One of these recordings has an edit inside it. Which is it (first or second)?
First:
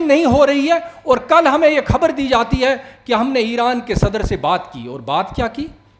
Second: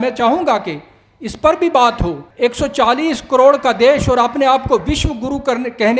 second